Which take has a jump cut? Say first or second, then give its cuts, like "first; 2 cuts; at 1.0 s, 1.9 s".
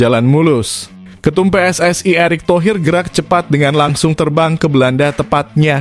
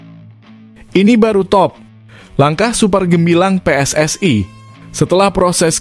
second; 1 cut; at 0.9 s